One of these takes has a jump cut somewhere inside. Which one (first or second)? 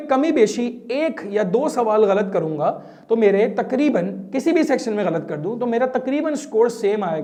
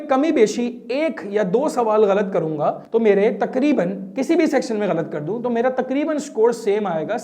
second